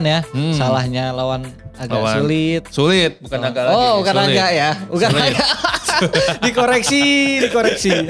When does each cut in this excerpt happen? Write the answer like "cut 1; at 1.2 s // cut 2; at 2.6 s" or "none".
none